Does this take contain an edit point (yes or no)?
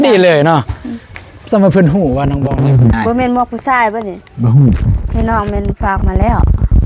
yes